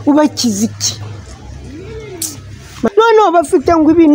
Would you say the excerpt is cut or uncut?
cut